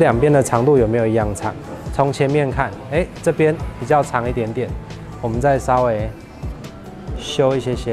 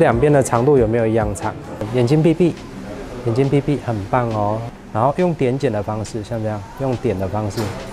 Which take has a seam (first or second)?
second